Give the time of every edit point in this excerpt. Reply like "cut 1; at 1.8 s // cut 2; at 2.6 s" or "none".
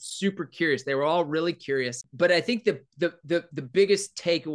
cut 1; at 2.0 s